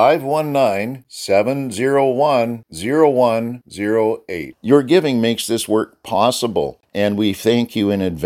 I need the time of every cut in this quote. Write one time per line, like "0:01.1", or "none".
0:06.8

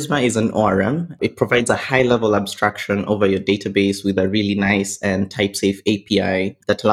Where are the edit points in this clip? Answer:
0:01.2

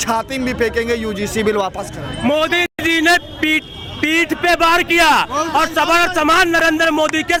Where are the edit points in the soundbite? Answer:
none

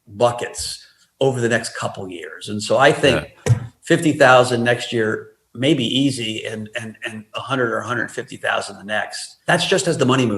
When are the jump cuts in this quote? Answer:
0:09.3

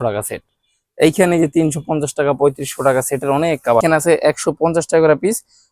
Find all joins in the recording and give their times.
0:03.8

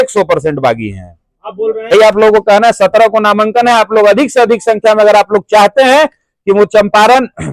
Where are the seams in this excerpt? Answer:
0:01.9

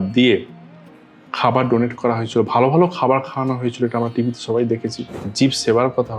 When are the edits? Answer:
0:05.2

